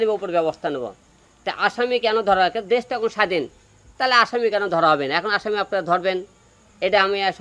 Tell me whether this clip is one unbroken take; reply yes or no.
yes